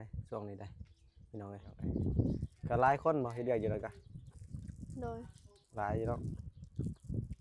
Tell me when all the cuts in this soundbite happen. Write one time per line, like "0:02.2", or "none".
0:01.7

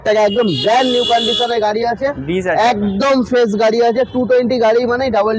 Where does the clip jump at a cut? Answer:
none

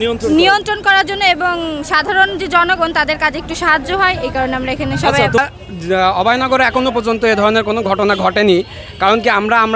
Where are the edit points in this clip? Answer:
0:05.4

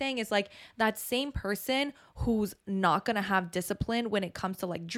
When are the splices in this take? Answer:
none

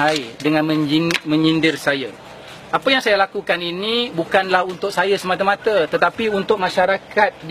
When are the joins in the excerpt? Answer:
0:01.3

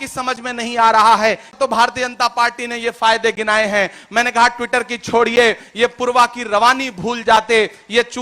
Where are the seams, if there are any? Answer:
0:01.5

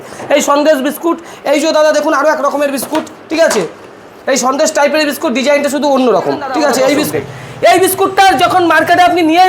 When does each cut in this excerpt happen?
0:07.1

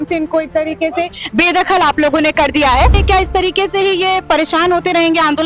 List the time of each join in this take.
0:03.0

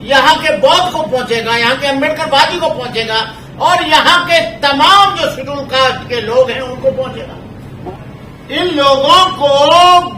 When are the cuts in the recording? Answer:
0:07.9

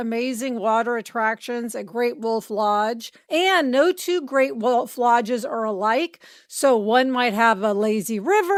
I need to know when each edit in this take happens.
none

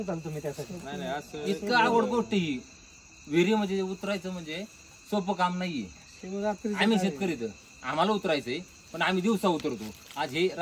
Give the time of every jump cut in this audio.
none

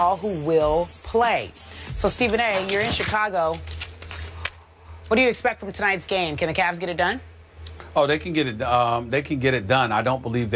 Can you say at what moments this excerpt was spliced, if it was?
0:02.9

